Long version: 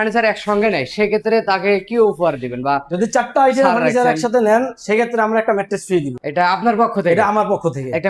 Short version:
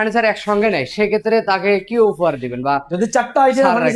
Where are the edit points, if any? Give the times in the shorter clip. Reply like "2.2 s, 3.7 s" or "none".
none